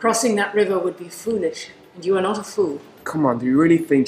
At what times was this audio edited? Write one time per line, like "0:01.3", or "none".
none